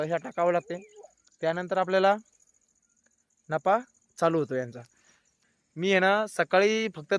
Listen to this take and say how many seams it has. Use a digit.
1